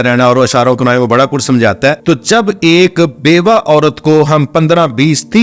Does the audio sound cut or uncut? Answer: cut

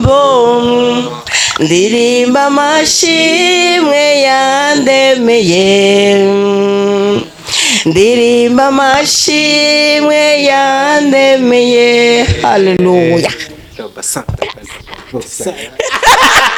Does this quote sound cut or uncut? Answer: uncut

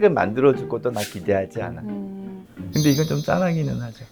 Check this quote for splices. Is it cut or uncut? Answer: cut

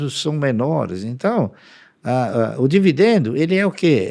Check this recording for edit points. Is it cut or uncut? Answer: uncut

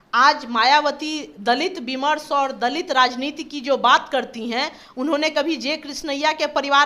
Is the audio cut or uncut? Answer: uncut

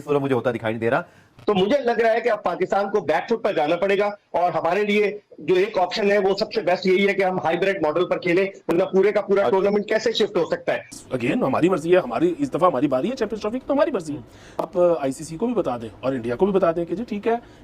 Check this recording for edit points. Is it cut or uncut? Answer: cut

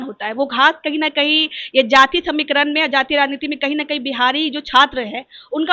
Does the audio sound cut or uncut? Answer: uncut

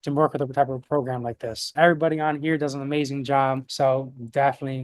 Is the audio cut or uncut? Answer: cut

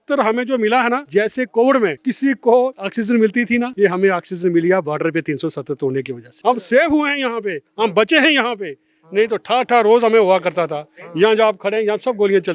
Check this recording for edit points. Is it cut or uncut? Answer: cut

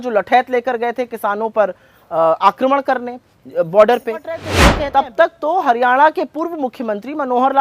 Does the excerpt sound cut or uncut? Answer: cut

